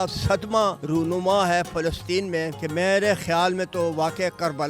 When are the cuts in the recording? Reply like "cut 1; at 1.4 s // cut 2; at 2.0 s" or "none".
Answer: cut 1; at 0.8 s // cut 2; at 2.6 s